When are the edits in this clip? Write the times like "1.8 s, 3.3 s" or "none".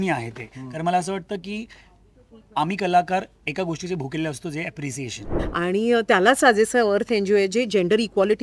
5.3 s